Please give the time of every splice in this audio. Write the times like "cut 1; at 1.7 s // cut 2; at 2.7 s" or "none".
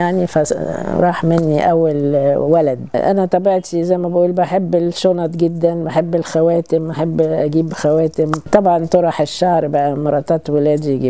cut 1; at 3.0 s // cut 2; at 8.4 s